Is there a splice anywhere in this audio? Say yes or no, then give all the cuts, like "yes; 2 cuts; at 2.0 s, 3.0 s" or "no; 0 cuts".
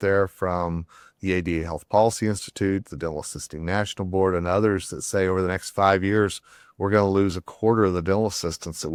no; 0 cuts